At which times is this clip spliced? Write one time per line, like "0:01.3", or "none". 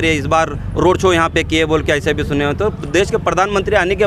none